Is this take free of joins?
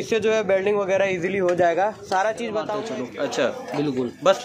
no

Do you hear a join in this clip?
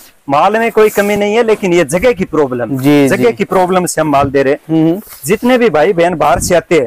no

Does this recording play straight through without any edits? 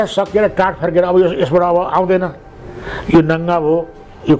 yes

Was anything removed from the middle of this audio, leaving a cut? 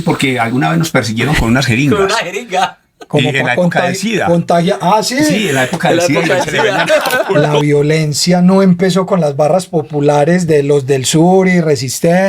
yes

